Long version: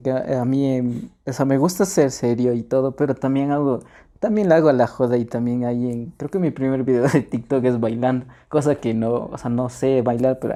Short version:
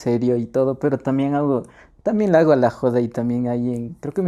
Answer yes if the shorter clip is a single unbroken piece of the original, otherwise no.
yes